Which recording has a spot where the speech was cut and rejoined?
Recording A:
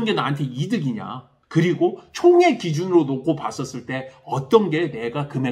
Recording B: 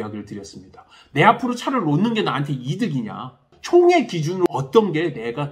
B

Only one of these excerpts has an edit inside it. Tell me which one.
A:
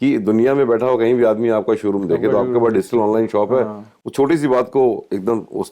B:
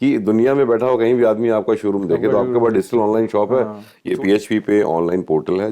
B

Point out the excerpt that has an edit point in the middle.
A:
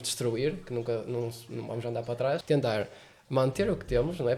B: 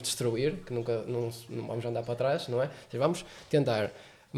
A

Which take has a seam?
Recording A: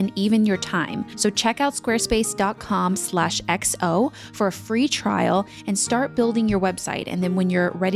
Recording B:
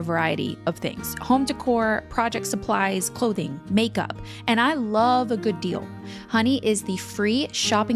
A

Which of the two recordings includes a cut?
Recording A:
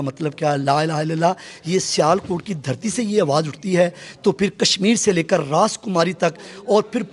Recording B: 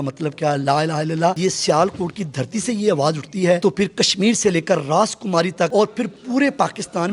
B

